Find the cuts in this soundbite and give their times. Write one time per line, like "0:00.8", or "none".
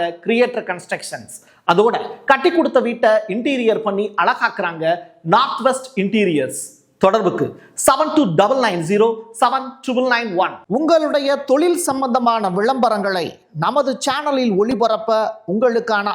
0:10.6

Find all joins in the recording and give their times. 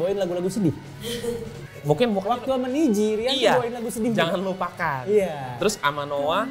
none

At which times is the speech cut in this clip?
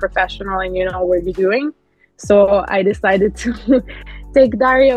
none

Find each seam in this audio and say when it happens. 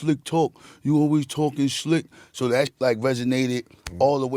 0:02.7

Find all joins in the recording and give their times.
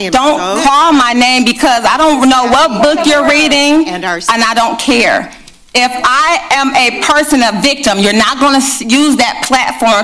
none

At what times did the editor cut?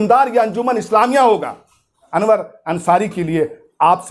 0:02.1

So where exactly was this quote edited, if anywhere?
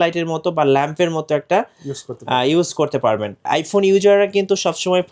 0:03.4

